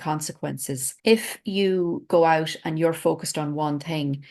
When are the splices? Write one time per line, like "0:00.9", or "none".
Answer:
none